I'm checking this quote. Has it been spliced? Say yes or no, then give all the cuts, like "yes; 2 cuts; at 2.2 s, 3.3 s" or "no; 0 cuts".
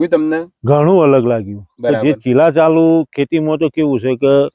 no; 0 cuts